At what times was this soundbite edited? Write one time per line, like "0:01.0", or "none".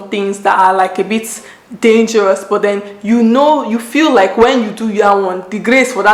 none